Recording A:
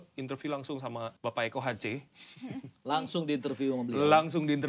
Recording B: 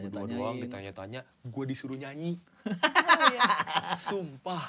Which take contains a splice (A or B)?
A